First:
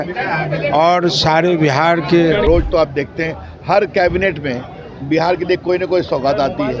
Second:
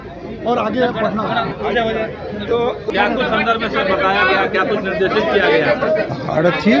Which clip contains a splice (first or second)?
first